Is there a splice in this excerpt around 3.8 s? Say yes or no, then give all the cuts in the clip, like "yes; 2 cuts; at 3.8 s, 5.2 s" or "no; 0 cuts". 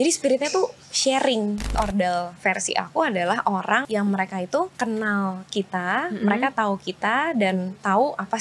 yes; 3 cuts; at 1.7 s, 3.8 s, 4.7 s